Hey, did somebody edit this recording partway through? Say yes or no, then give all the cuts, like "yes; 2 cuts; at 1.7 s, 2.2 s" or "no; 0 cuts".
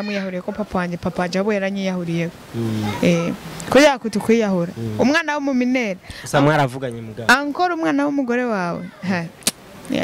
no; 0 cuts